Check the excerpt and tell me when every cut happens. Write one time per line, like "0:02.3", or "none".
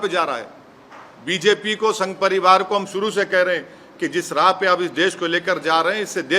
none